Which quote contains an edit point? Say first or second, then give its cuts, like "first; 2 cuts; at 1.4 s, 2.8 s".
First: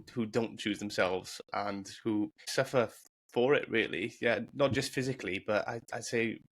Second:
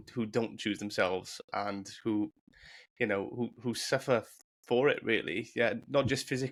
first; 1 cut; at 2.5 s